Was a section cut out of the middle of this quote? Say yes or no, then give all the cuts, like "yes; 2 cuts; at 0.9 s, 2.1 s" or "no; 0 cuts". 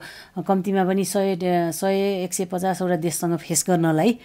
no; 0 cuts